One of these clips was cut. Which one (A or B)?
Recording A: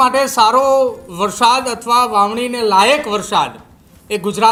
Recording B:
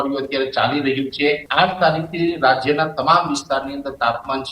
B